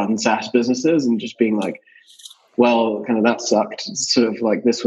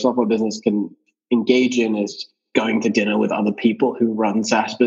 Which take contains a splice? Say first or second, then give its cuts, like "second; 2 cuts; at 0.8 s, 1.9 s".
second; 2 cuts; at 1.1 s, 2.3 s